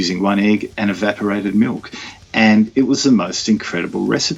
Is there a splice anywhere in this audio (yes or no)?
no